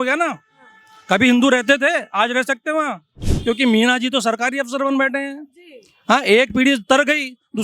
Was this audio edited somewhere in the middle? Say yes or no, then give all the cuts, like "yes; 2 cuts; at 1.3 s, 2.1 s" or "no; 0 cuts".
yes; 1 cut; at 3.3 s